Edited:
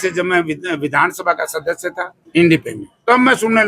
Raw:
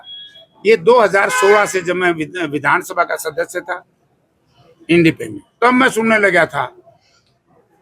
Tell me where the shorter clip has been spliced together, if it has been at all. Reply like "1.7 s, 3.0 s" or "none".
2.1 s